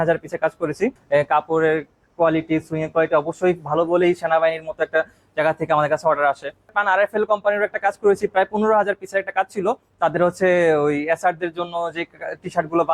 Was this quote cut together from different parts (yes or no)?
yes